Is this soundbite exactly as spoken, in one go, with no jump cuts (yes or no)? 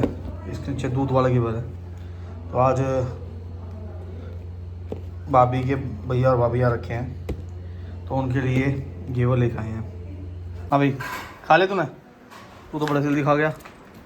no